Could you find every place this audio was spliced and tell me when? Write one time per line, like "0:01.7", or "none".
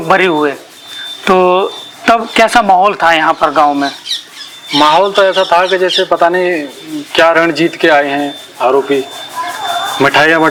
none